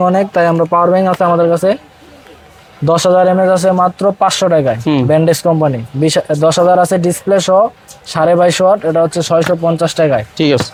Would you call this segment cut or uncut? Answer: uncut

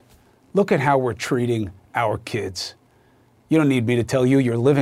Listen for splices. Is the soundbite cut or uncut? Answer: uncut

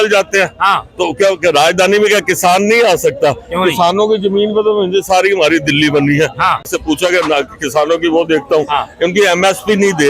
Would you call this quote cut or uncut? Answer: cut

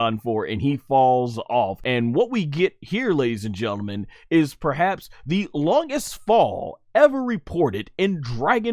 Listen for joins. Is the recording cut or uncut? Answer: cut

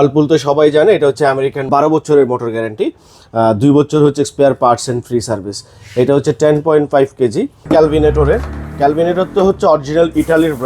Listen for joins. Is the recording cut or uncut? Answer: cut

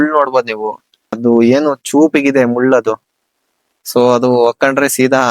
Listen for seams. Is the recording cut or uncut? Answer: cut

